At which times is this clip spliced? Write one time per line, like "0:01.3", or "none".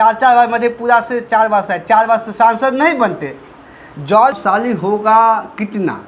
0:04.4